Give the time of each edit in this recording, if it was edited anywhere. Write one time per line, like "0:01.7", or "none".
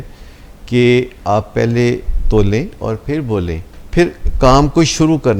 0:03.8